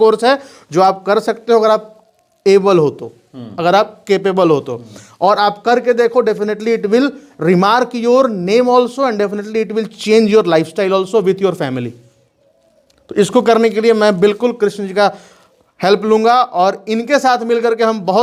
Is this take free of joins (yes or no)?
yes